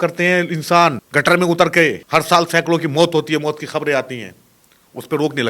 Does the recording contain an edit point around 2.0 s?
yes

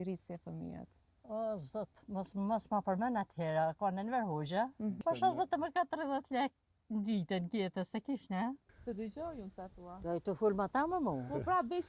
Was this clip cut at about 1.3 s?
no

